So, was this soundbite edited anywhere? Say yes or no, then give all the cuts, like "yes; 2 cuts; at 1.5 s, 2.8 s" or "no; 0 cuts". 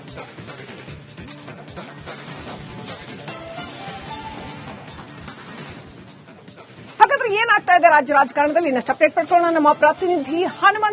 yes; 1 cut; at 0.9 s